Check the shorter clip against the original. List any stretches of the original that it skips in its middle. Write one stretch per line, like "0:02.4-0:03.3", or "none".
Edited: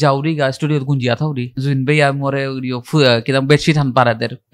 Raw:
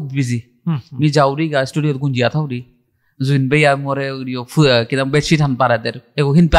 0:02.6-0:03.1

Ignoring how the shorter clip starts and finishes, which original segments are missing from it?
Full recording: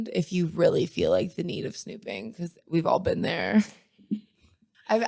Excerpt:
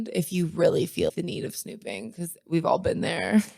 0:01.1-0:01.3

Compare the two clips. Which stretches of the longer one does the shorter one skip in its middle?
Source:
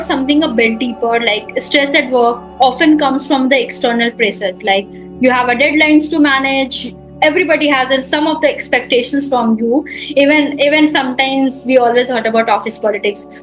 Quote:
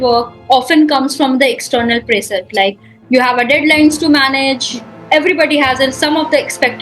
none

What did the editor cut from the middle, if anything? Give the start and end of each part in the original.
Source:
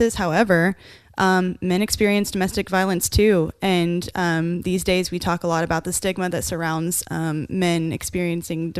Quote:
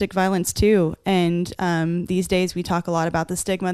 none

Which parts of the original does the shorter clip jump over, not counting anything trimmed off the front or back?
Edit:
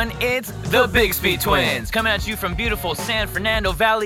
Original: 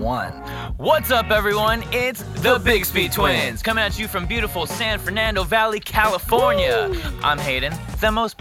none

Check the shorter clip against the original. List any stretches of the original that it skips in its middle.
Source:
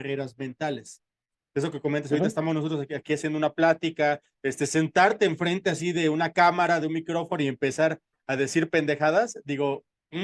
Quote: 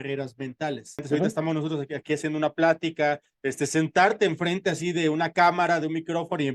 0:01.0-0:02.0

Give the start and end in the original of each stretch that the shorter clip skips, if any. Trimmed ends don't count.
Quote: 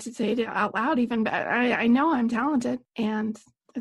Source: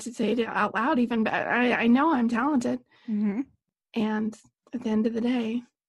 0:02.9-0:03.8

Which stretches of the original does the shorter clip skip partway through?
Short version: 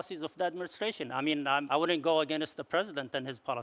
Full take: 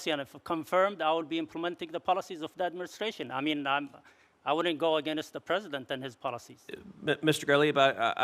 0:03.9-0:04.4

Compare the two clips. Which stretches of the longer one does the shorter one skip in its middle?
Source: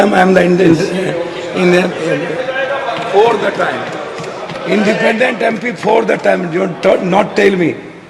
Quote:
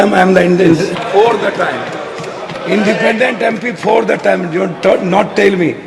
0:00.9-0:02.9

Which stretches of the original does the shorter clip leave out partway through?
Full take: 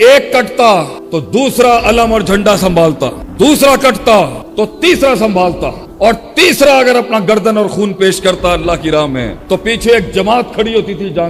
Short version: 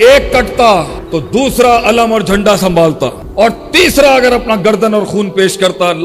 0:03.2-0:05.9

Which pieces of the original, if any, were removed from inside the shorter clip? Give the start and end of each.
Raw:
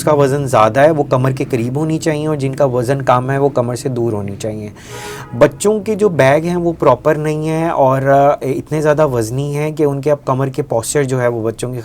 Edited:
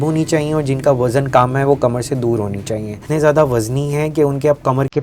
0:04.8-0:08.6

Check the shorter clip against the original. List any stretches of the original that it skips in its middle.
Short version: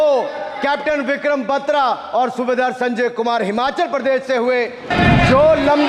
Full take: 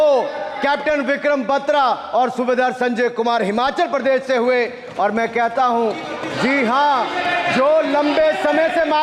0:04.9-0:07.1

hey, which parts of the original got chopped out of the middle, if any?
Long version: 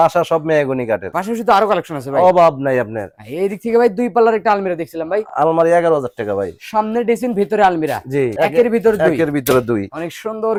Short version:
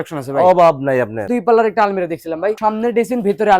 0:03.0-0:03.9
0:05.2-0:06.7

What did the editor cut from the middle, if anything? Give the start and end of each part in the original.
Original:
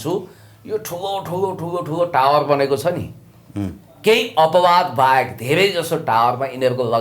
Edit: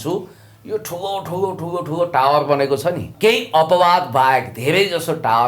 0:03.1-0:03.9

